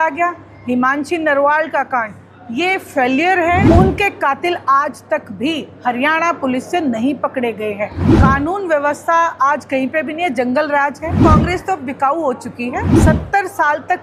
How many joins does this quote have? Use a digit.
4